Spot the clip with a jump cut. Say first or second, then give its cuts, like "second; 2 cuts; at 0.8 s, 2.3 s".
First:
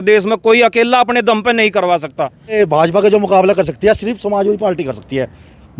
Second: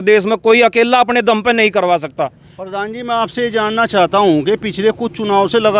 first; 1 cut; at 2.5 s